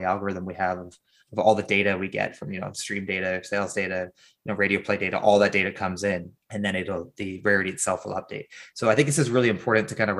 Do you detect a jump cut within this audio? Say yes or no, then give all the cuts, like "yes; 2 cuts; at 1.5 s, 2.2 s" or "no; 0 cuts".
yes; 1 cut; at 6.4 s